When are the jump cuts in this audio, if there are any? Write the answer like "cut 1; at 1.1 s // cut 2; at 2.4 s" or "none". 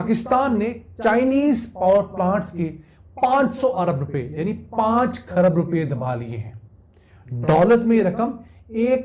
none

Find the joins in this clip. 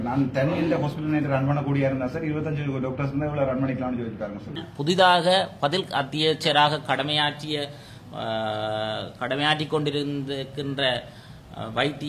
cut 1; at 4.7 s

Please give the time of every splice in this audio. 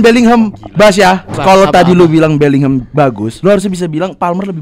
cut 1; at 1.3 s

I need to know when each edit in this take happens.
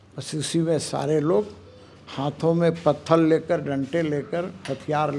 none

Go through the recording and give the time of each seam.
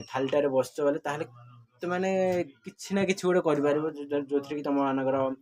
none

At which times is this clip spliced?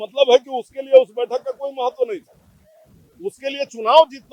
none

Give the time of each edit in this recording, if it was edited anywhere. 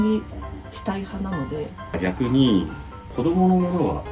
cut 1; at 1.9 s

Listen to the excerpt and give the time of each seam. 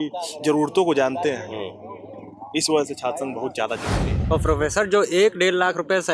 cut 1; at 4.1 s

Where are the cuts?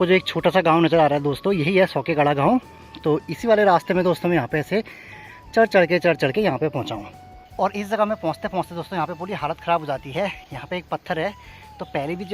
none

